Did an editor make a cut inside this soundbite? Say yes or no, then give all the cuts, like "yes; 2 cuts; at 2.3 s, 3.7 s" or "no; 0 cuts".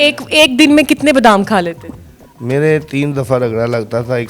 no; 0 cuts